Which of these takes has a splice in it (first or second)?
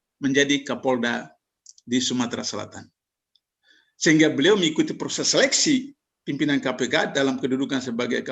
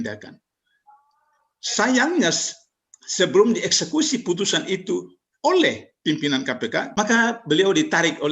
second